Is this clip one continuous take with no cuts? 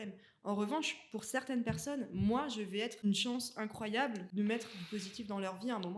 no; 2 cuts; at 3.0 s, 4.2 s

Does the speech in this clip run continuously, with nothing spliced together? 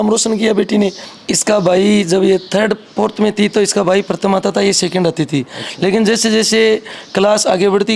no; 1 cut; at 1.1 s

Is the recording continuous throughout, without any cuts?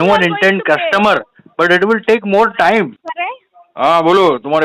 no; 1 cut; at 3.1 s

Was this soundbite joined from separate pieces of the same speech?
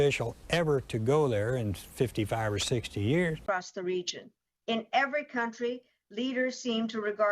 yes; 1 cut; at 3.4 s

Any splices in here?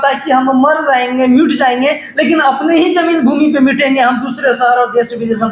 no; 0 cuts

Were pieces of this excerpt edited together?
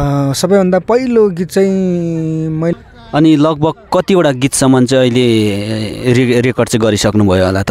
yes; 1 cut; at 2.7 s

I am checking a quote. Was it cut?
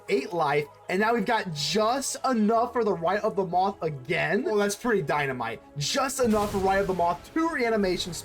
yes; 1 cut; at 4.5 s

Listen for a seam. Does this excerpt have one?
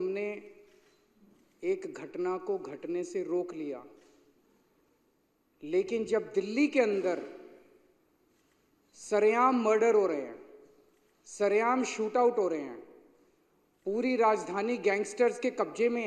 no; 0 cuts

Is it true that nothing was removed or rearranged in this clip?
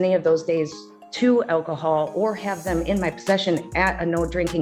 yes; 0 cuts

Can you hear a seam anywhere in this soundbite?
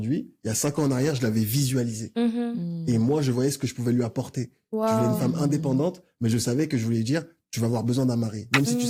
no; 0 cuts

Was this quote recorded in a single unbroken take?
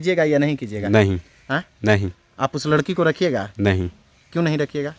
yes; 0 cuts

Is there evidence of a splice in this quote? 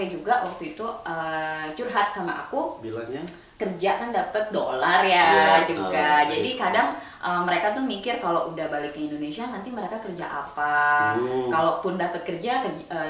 yes; 1 cut; at 3.4 s

